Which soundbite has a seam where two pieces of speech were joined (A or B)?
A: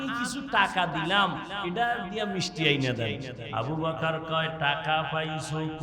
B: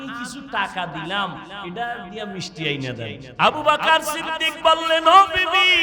B